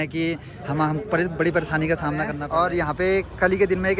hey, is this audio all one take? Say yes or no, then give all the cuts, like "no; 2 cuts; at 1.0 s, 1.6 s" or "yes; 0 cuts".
no; 1 cut; at 2.4 s